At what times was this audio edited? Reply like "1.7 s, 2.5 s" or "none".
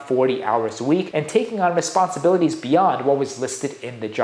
1.1 s

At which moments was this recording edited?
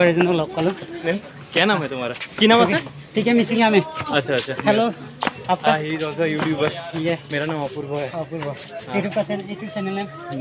1.0 s

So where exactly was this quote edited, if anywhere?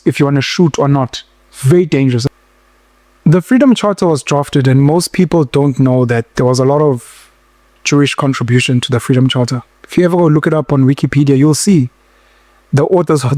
2.2 s

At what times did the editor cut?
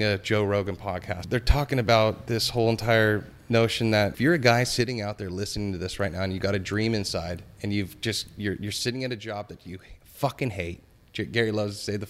1.1 s, 4.1 s

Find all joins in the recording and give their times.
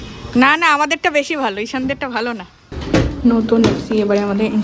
2.7 s

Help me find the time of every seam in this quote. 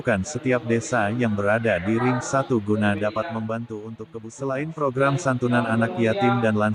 4.2 s

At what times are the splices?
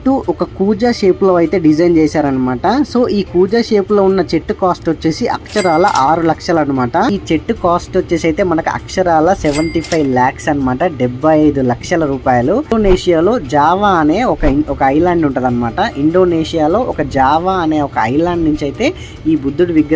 7.1 s, 12.7 s

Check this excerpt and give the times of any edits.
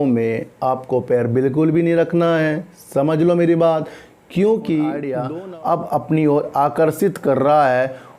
5.2 s

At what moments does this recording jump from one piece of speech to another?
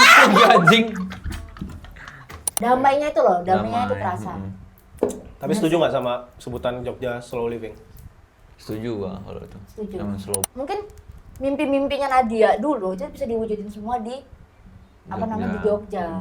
2.5 s, 10.4 s

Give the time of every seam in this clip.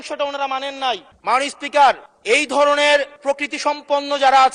1.1 s, 2.1 s, 3.1 s

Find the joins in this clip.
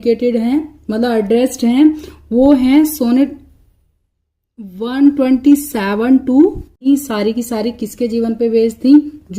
6.9 s

